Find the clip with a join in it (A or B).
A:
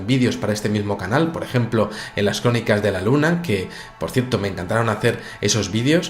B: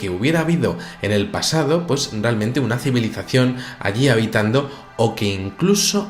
A